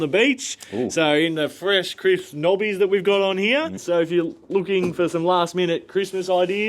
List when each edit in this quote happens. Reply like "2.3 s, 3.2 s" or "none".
3.8 s